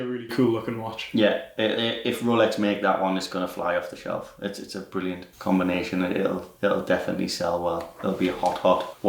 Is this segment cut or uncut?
uncut